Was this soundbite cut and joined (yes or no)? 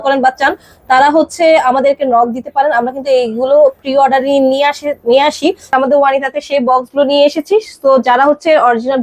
yes